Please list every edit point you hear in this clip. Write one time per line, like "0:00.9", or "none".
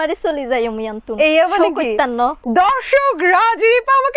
0:02.4